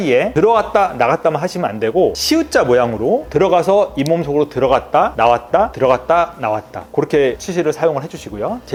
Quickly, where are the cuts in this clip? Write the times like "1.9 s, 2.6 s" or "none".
none